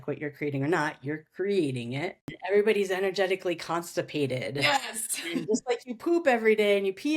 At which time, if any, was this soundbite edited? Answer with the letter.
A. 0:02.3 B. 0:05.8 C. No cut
A